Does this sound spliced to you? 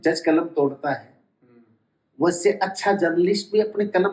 no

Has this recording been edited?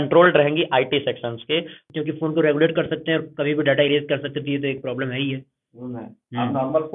yes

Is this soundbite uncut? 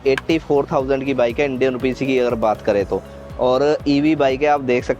yes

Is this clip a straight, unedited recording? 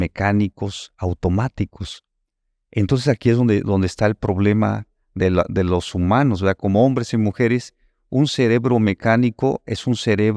yes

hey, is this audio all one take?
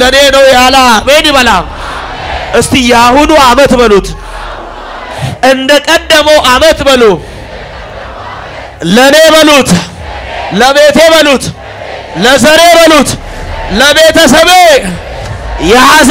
yes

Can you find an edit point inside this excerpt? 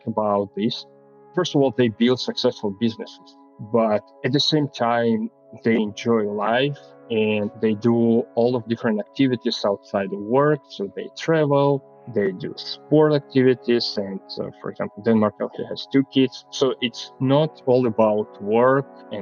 yes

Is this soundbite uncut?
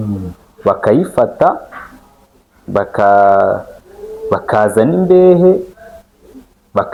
yes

